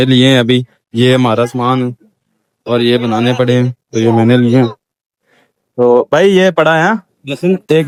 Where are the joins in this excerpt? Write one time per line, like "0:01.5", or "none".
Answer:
none